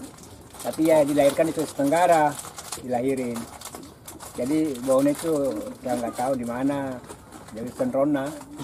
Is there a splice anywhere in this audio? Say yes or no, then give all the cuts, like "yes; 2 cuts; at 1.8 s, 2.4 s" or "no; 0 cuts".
no; 0 cuts